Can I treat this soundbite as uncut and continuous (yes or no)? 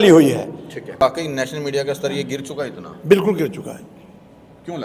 yes